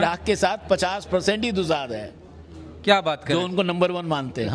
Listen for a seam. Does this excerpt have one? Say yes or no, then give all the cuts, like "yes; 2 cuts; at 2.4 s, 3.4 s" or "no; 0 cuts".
no; 0 cuts